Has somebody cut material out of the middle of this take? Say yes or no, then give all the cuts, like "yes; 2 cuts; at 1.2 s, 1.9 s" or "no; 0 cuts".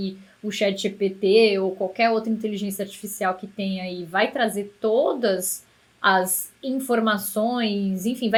no; 0 cuts